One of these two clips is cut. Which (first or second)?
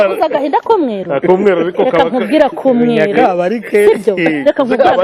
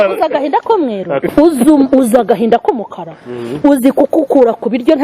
second